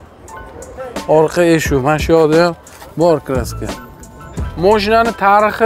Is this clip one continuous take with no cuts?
no; 2 cuts; at 0.9 s, 4.4 s

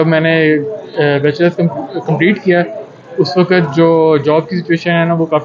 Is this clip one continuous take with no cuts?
yes; 0 cuts

